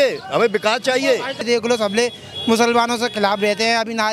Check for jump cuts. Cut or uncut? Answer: cut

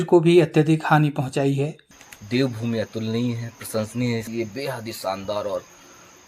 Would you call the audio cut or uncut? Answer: cut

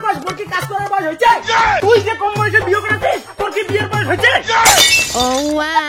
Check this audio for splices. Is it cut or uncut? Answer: uncut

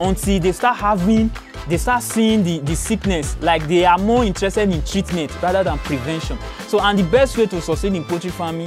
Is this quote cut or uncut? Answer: uncut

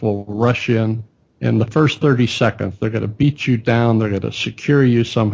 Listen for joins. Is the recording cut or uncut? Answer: uncut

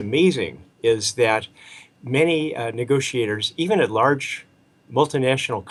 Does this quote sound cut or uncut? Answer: uncut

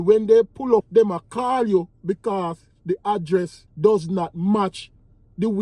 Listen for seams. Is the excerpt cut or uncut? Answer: cut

